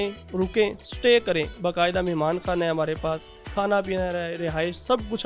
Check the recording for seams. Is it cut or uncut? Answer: uncut